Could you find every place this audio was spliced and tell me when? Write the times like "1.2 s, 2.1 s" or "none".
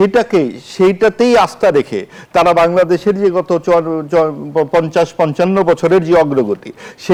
none